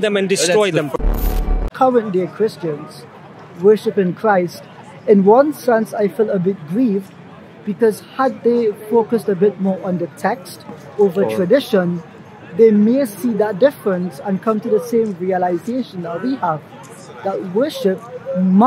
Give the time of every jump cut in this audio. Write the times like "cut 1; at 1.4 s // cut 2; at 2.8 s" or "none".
cut 1; at 1.2 s